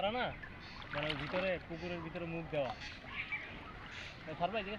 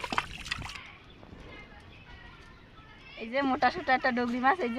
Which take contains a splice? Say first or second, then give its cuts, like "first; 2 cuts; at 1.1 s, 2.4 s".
second; 2 cuts; at 0.7 s, 3.2 s